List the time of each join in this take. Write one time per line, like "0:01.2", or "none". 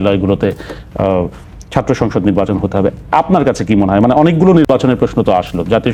none